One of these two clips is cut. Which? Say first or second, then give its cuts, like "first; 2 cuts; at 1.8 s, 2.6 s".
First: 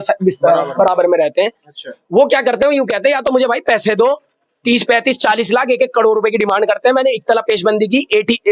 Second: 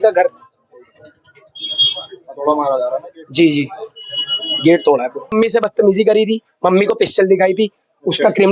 second; 1 cut; at 5.3 s